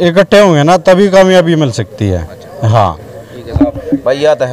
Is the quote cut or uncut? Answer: uncut